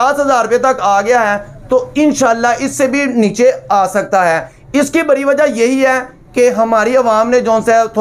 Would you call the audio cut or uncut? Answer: uncut